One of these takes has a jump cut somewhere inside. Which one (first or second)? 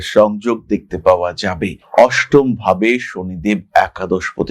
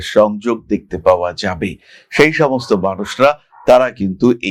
first